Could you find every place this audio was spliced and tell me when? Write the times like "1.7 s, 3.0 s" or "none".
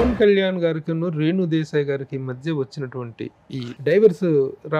none